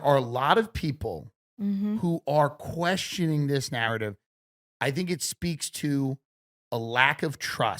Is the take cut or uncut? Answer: cut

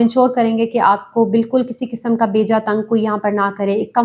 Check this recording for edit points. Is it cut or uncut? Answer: uncut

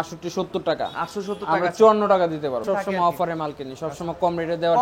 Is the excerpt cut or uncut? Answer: cut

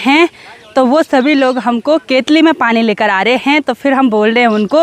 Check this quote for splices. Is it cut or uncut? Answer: uncut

